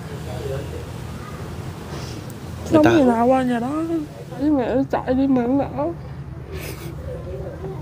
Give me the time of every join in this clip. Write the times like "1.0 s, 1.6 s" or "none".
4.4 s